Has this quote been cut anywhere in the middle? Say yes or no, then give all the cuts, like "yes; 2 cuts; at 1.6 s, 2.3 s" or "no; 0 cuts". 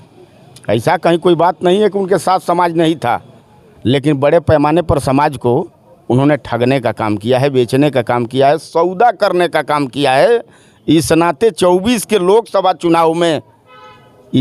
no; 0 cuts